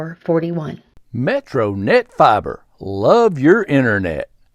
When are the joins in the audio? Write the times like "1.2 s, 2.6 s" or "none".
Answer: 0.9 s